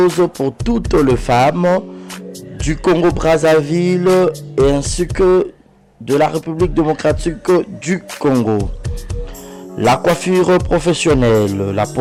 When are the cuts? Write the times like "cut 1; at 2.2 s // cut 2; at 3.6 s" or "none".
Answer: none

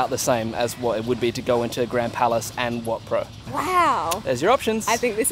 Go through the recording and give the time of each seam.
cut 1; at 3.5 s

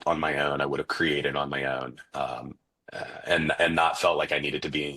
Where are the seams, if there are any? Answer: none

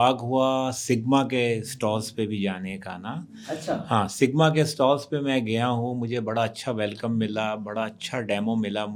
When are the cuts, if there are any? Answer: none

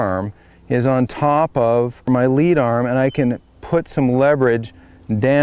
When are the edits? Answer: cut 1; at 2.1 s

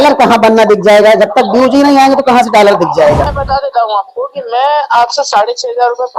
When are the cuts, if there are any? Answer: cut 1; at 3.3 s

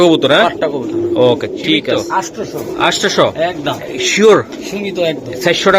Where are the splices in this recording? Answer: cut 1; at 2.0 s

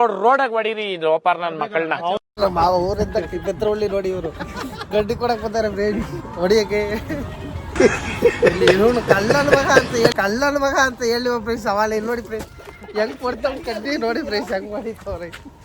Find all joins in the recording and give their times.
cut 1; at 2.3 s

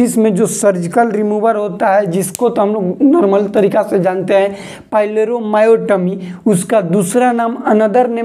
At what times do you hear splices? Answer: none

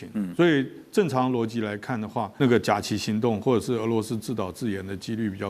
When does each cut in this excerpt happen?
cut 1; at 2.3 s

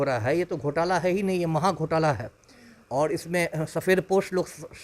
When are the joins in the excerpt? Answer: none

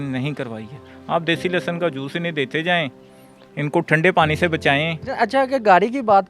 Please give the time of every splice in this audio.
cut 1; at 5.0 s

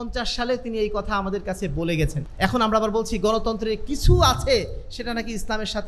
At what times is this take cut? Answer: cut 1; at 2.2 s

